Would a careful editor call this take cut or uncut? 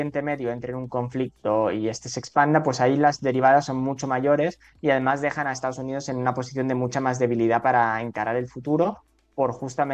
uncut